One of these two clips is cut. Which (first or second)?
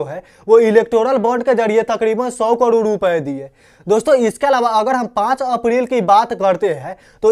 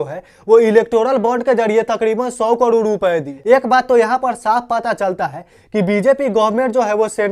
second